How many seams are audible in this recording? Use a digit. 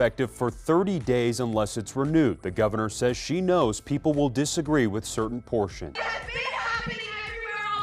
1